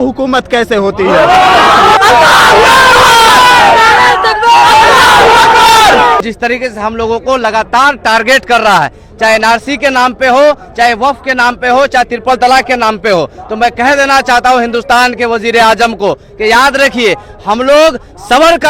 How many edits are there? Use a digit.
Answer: 2